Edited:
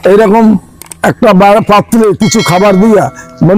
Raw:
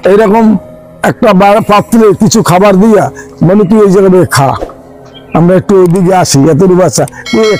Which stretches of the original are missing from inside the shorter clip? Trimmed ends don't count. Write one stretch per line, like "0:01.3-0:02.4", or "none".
none